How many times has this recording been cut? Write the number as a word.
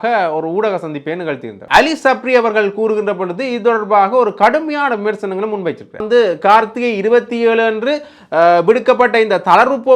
two